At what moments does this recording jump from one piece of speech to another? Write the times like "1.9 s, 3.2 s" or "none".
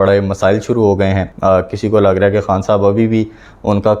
1.3 s